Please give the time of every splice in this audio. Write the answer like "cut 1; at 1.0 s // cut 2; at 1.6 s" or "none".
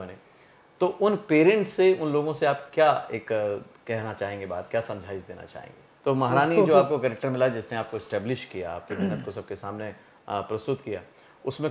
cut 1; at 5.8 s